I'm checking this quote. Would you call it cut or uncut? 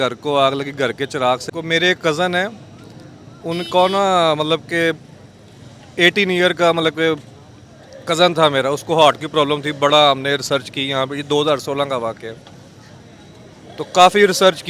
cut